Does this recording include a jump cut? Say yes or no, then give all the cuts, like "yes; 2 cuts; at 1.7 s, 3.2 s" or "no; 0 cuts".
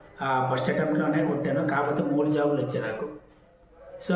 no; 0 cuts